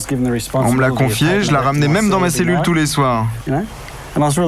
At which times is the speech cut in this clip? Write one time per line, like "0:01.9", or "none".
0:03.4